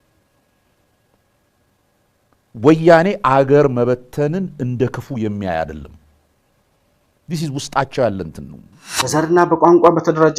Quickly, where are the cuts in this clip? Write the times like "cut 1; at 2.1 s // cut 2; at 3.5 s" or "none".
cut 1; at 9.1 s

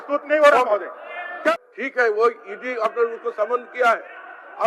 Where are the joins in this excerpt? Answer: cut 1; at 1.6 s

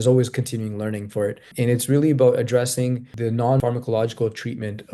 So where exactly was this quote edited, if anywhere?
cut 1; at 1.5 s // cut 2; at 3.4 s

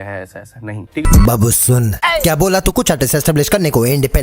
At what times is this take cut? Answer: cut 1; at 1.0 s

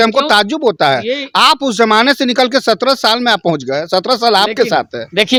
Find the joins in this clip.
none

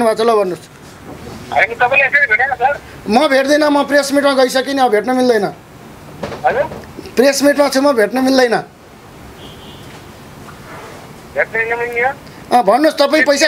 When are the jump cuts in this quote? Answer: none

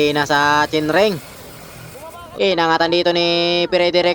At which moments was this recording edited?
cut 1; at 2.2 s

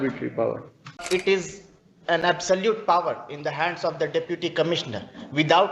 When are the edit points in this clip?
cut 1; at 1.0 s

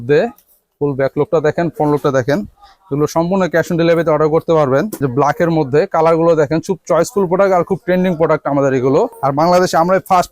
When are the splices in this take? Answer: cut 1; at 5.0 s // cut 2; at 9.1 s

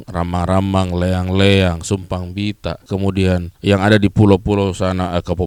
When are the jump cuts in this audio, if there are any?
none

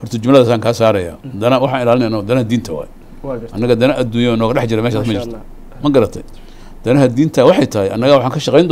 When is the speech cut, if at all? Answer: none

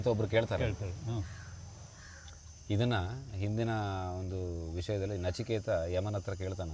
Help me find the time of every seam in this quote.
none

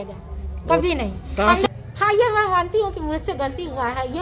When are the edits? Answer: cut 1; at 1.7 s

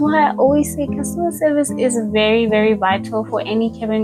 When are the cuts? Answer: none

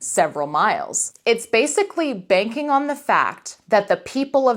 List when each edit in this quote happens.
cut 1; at 1.0 s

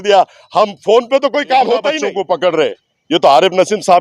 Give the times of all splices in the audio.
cut 1; at 2.1 s

